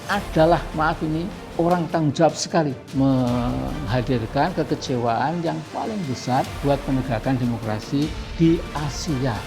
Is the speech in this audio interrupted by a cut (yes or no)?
yes